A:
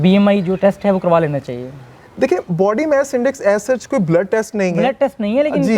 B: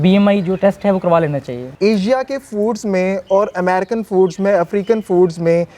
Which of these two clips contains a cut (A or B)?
B